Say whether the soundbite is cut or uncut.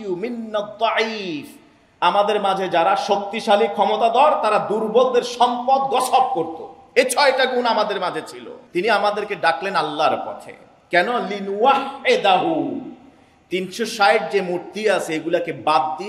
cut